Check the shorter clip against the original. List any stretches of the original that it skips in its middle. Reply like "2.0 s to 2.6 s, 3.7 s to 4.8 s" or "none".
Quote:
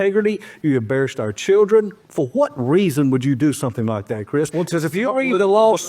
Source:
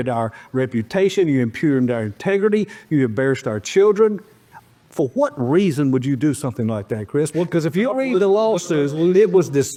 4.3 s to 4.8 s